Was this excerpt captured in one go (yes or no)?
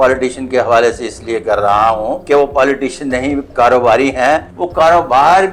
no